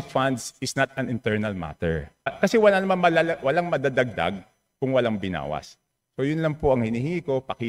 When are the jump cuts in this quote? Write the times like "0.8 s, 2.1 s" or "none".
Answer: 2.3 s